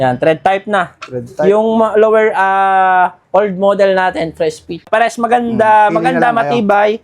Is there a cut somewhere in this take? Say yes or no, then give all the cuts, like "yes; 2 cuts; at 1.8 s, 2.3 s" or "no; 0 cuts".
yes; 1 cut; at 4.9 s